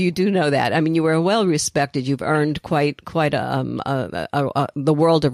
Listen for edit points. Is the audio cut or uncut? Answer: uncut